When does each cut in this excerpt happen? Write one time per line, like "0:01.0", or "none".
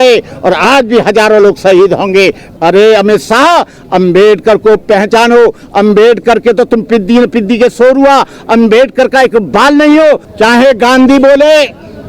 0:02.4
0:10.3